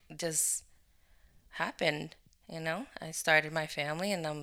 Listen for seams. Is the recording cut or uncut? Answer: uncut